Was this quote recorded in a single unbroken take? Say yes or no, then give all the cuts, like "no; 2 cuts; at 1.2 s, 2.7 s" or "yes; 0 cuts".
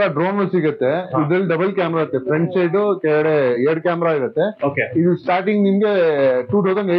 yes; 0 cuts